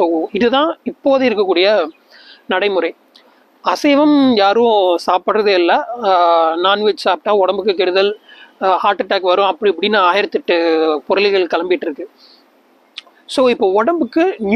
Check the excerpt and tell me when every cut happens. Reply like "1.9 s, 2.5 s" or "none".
none